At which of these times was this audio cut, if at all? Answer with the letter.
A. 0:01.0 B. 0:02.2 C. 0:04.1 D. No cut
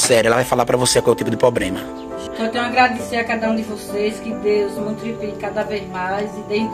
B